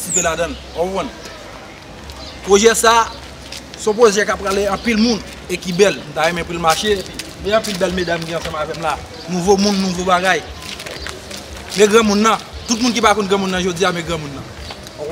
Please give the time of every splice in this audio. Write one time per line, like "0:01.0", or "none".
none